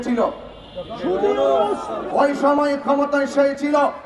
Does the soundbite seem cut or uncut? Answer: cut